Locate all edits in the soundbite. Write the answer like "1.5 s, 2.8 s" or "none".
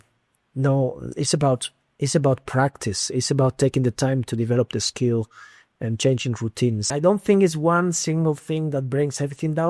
6.9 s